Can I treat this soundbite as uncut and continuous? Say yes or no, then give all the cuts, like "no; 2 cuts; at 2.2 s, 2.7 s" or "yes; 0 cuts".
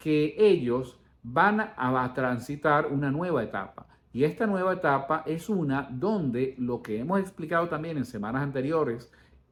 yes; 0 cuts